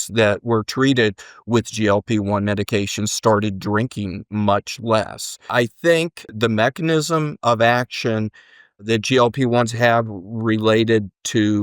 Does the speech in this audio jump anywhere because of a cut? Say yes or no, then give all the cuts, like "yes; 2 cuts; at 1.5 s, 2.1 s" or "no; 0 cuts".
yes; 2 cuts; at 5.5 s, 6.3 s